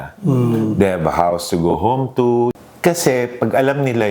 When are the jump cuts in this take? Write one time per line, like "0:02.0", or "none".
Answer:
0:02.6